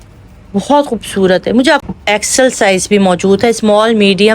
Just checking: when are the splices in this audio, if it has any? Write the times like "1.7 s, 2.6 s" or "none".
1.8 s